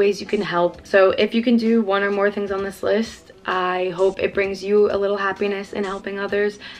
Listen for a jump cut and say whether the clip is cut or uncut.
uncut